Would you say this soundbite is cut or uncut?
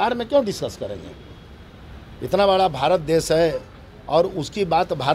uncut